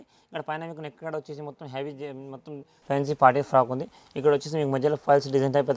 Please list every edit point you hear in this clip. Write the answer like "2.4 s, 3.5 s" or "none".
2.7 s